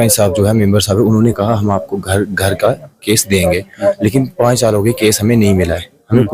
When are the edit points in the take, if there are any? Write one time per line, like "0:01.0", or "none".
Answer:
none